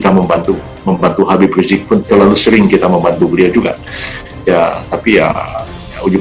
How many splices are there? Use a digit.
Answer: 0